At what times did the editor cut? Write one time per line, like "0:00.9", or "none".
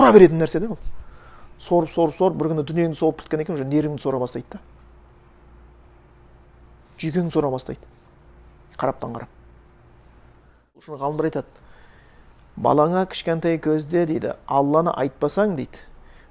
0:10.9